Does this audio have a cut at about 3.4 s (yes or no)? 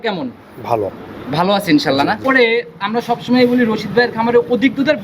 no